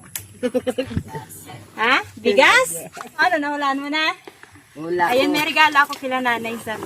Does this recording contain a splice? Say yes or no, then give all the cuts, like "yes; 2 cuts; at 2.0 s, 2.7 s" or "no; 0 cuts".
yes; 2 cuts; at 1.2 s, 3.1 s